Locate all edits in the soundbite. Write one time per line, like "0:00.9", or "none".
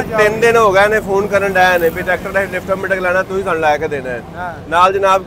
none